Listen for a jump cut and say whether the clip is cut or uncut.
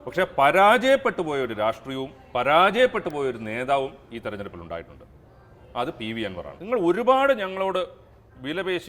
cut